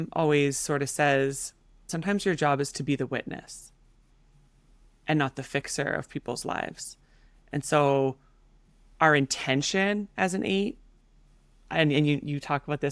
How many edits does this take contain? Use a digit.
1